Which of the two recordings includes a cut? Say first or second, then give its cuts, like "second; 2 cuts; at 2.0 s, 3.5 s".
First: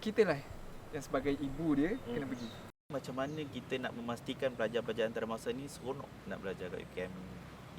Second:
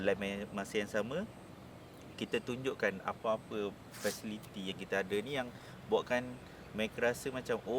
first; 1 cut; at 2.9 s